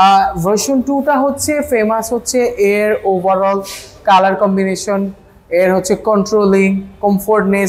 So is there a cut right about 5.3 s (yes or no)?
no